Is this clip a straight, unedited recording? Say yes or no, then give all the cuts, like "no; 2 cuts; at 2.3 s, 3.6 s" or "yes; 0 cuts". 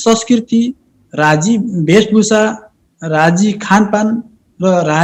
yes; 0 cuts